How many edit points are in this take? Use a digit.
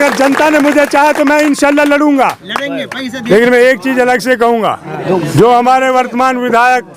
2